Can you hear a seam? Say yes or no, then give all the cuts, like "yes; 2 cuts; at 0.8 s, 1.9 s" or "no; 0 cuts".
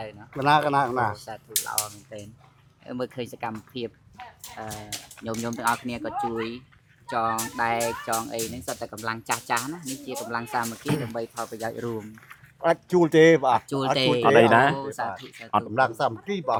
no; 0 cuts